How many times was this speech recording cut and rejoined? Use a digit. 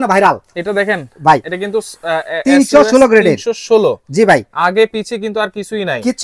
0